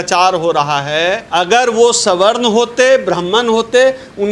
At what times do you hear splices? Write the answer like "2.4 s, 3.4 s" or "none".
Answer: 1.2 s